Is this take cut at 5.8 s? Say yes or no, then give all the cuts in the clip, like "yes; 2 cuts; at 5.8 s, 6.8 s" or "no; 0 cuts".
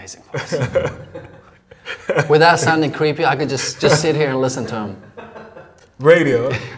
no; 0 cuts